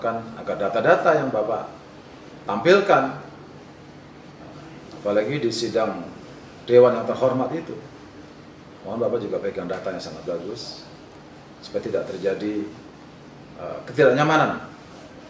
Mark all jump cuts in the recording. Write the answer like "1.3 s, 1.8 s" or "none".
none